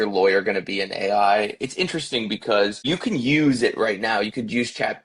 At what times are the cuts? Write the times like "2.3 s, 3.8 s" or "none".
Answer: 2.8 s